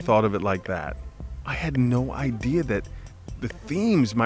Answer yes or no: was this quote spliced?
yes